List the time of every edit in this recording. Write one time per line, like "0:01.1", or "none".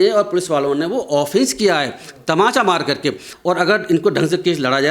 0:03.3